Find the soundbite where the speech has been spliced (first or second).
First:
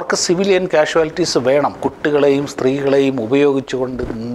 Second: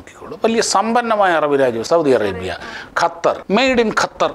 second